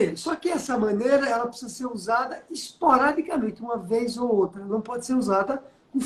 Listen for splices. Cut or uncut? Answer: uncut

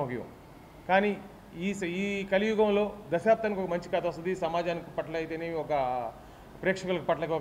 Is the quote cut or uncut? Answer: uncut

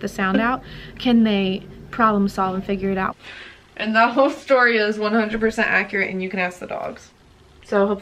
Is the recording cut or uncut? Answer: cut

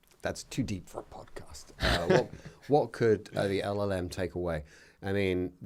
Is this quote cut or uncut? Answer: uncut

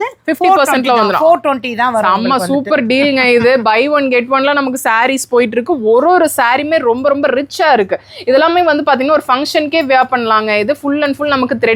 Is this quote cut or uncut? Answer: uncut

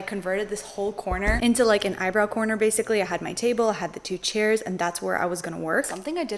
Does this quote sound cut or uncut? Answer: uncut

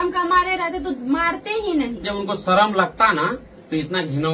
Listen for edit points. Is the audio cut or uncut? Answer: cut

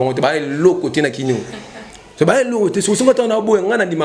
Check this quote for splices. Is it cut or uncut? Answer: uncut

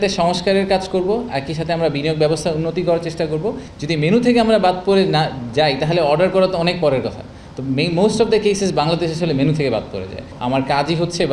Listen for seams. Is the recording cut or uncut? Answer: cut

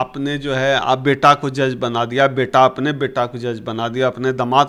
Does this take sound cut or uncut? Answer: uncut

